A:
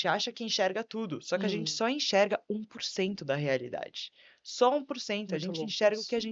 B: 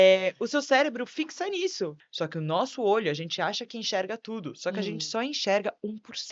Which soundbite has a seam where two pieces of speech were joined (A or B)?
B